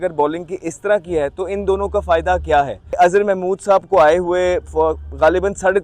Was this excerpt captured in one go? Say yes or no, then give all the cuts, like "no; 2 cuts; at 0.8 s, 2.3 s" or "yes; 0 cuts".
no; 1 cut; at 2.8 s